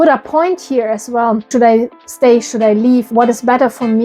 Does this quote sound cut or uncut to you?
cut